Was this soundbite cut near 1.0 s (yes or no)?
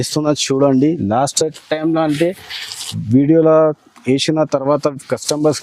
no